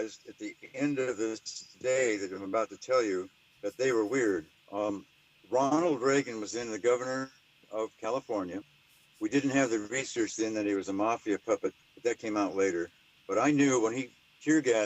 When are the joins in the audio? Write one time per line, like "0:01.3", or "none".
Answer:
0:06.8